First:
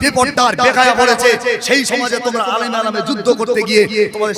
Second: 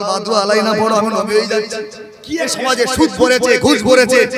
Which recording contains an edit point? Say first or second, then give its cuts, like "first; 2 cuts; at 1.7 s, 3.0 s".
second; 1 cut; at 2.5 s